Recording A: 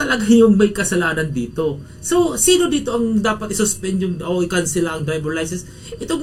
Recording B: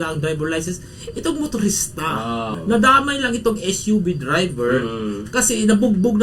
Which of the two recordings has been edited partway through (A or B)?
B